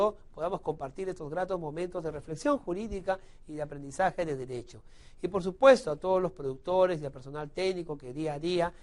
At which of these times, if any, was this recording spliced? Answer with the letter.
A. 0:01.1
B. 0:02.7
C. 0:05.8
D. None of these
C